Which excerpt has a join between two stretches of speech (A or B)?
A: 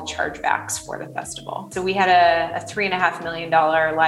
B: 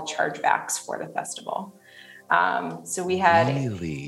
A